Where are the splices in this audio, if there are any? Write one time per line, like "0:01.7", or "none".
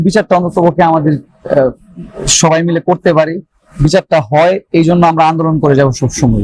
none